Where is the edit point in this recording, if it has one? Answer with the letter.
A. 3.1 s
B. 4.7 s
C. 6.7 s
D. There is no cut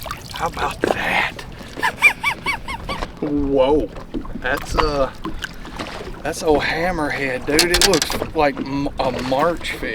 A